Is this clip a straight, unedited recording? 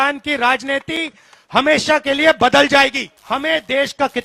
no; 1 cut; at 3.1 s

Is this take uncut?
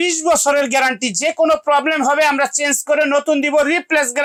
yes; 0 cuts

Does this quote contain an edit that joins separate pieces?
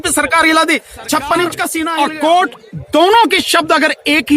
yes; 1 cut; at 1.8 s

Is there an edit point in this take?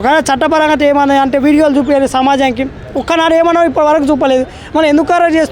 no; 0 cuts

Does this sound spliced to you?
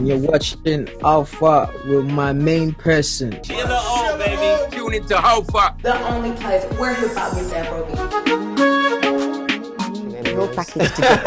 no; 0 cuts

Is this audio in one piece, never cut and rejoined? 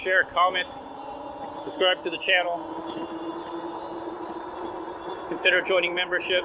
yes; 0 cuts

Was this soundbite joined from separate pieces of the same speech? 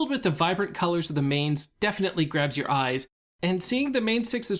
yes; 1 cut; at 1.1 s

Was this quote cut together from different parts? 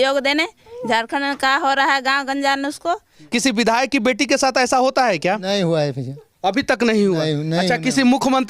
yes; 1 cut; at 3.2 s

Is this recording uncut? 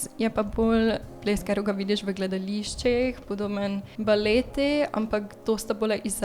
no; 1 cut; at 3.9 s

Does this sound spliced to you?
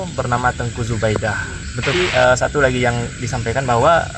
yes; 1 cut; at 1.9 s

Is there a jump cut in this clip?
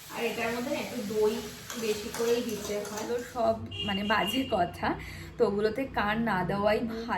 yes; 1 cut; at 3.0 s

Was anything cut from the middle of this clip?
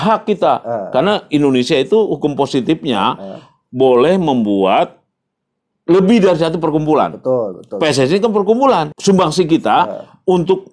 yes; 1 cut; at 8.9 s

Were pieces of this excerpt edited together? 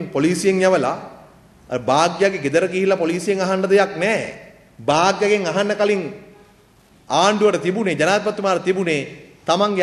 no; 0 cuts

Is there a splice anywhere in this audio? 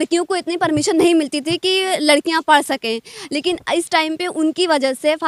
no; 0 cuts

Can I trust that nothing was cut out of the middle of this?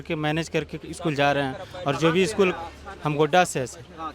yes; 0 cuts

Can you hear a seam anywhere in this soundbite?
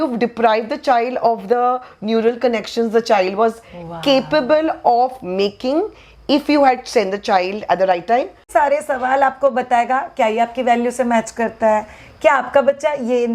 yes; 1 cut; at 8.5 s

